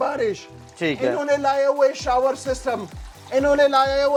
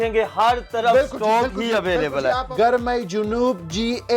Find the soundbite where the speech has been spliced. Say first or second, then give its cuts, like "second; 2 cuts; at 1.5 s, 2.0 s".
second; 1 cut; at 2.5 s